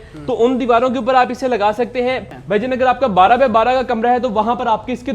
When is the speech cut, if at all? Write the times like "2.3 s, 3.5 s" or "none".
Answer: 2.3 s